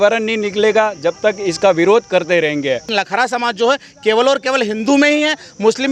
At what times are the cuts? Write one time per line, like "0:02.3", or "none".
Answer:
0:02.9